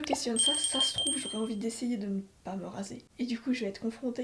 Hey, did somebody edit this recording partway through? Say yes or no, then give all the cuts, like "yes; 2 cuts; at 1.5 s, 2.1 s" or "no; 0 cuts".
yes; 1 cut; at 3.0 s